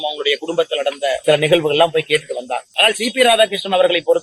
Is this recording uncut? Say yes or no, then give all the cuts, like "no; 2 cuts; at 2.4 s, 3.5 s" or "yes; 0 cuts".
no; 2 cuts; at 1.2 s, 2.7 s